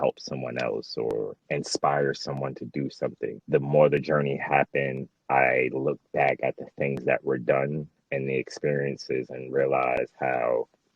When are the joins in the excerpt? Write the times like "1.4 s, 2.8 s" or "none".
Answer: 1.4 s, 3.4 s